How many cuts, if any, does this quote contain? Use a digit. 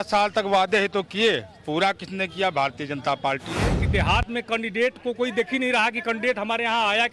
1